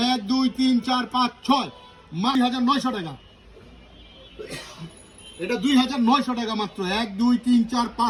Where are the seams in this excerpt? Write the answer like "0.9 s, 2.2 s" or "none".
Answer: none

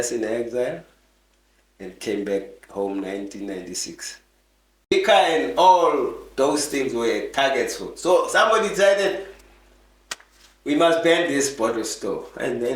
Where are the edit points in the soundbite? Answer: 4.9 s

